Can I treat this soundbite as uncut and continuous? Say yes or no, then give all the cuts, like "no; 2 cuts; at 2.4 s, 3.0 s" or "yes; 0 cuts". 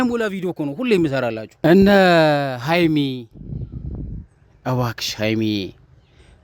no; 1 cut; at 1.4 s